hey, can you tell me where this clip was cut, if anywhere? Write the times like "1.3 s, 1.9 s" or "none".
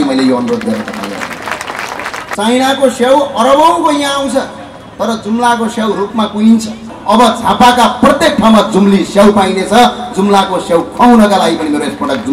2.4 s, 6.9 s